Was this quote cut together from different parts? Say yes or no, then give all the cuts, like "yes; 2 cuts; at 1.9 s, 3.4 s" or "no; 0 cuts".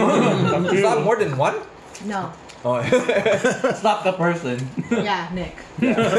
no; 0 cuts